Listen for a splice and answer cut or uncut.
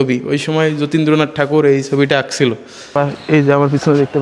cut